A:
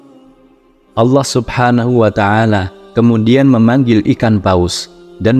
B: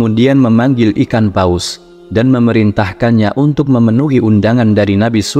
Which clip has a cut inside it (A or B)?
A